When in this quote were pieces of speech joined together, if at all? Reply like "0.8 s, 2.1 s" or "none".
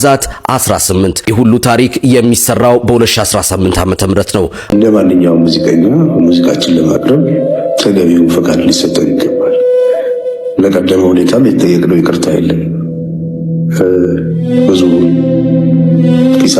4.6 s